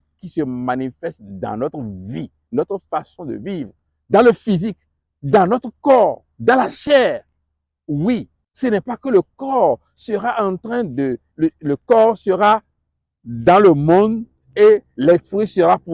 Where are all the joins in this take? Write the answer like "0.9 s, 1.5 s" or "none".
none